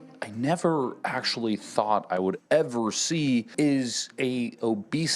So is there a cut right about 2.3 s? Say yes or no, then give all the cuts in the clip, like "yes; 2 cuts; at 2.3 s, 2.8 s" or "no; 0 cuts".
no; 1 cut; at 3.5 s